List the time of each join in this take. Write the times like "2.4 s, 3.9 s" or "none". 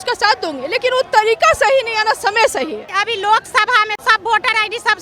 3.0 s, 4.0 s